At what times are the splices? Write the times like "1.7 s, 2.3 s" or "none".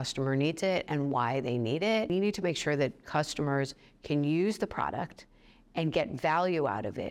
2.1 s